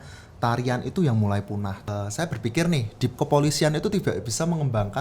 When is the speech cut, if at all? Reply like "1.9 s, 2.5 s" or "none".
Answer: 1.8 s